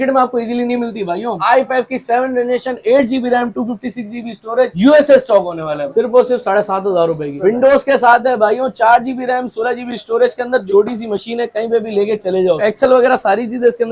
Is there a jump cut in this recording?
yes; 4 cuts; at 1.4 s, 5.8 s, 7.4 s, 12.6 s

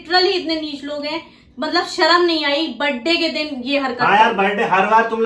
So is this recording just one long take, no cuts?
yes; 0 cuts

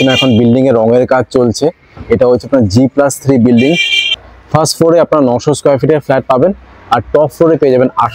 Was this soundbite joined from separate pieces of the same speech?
no; 0 cuts

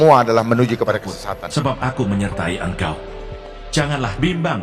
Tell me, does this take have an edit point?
yes; 1 cut; at 1.4 s

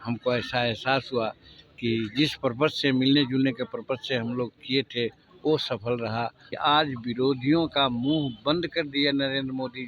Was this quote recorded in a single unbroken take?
no; 1 cut; at 6.5 s

